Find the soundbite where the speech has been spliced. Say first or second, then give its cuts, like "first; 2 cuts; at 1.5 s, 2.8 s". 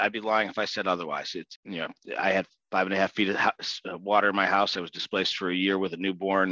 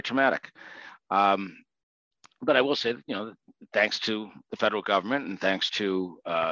first; 1 cut; at 1.4 s